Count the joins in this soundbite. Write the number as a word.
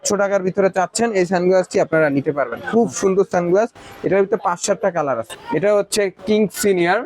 one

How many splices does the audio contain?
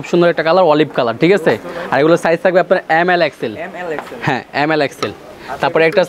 zero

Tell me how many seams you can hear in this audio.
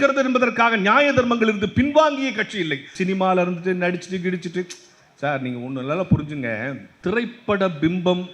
two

